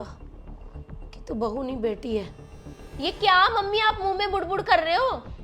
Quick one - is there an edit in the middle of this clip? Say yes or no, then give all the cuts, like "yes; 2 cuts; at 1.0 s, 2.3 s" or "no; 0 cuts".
no; 0 cuts